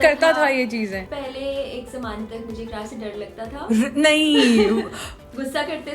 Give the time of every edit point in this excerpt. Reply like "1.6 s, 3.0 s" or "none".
1.0 s